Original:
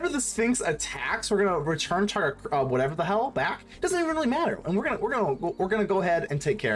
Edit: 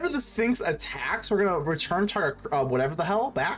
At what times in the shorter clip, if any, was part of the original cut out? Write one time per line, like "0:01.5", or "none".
none